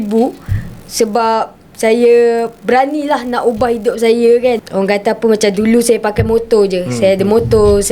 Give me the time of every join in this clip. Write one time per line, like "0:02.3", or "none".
0:04.7